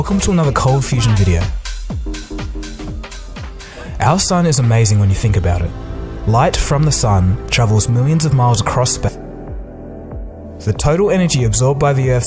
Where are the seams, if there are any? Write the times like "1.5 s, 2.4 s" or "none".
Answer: none